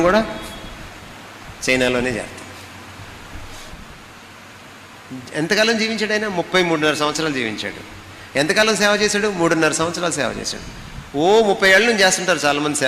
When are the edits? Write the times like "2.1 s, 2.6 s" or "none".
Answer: 3.7 s